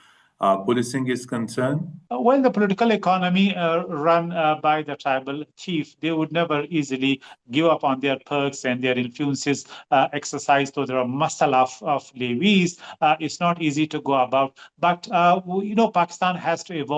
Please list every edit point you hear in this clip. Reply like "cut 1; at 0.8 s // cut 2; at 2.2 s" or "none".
none